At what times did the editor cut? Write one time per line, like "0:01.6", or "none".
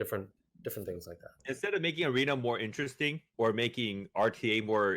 0:01.4
0:03.2

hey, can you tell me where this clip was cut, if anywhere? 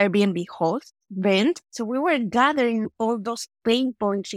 0:01.6
0:02.9

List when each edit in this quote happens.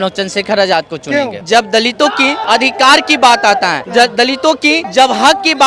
0:01.4
0:02.4
0:03.8
0:04.9

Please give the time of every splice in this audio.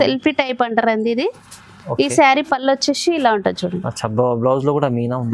none

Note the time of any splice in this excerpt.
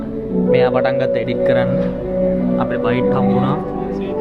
none

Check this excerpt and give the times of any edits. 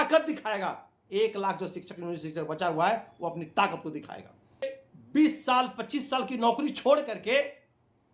0:04.6

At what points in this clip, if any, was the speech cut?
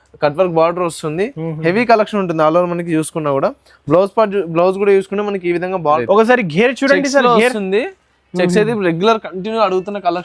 0:06.0

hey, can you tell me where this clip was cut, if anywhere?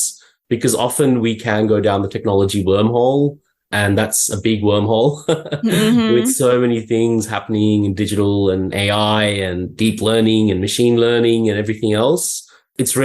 0:08.7

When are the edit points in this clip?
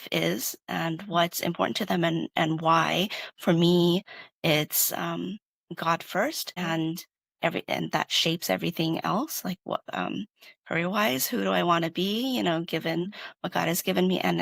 0:06.6

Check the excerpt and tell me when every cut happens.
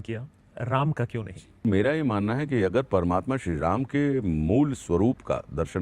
0:01.6

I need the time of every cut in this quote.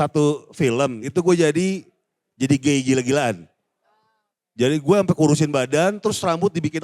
0:01.0

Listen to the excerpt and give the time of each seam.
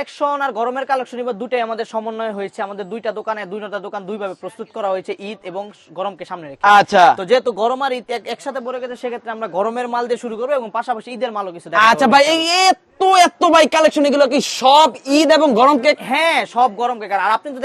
none

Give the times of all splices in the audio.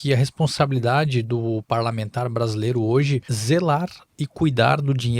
0:03.3

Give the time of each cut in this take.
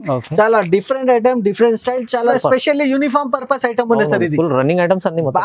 0:02.4

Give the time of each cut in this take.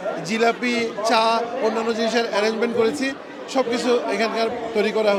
none

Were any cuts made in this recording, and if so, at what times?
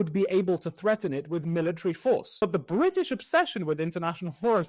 0:02.3

